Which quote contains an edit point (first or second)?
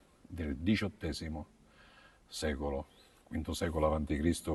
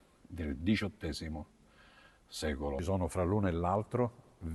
second